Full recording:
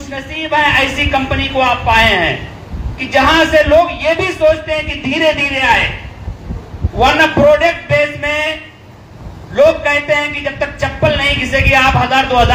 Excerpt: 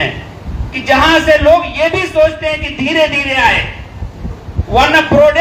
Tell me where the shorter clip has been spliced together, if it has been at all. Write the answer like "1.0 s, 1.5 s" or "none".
none